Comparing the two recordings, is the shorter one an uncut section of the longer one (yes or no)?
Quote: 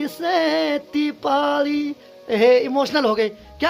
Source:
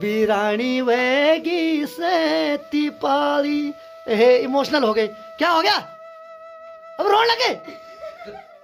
yes